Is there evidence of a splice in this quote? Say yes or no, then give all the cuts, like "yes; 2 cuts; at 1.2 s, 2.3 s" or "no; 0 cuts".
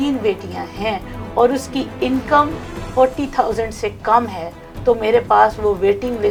no; 0 cuts